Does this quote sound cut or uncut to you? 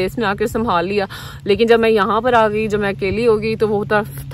uncut